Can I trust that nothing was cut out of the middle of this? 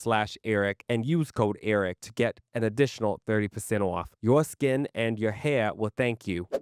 yes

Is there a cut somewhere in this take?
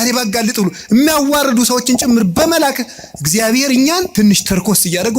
yes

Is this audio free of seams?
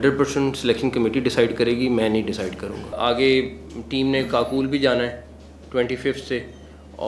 no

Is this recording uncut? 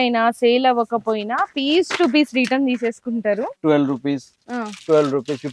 no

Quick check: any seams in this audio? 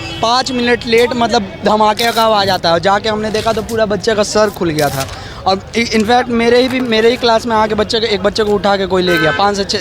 no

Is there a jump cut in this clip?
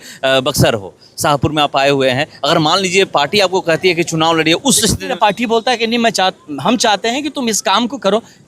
yes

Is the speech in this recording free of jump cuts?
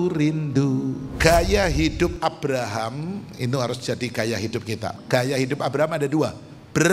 no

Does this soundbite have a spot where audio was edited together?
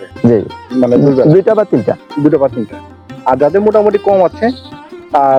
no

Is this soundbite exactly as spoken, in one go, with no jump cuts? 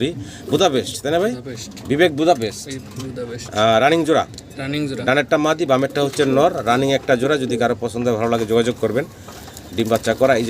yes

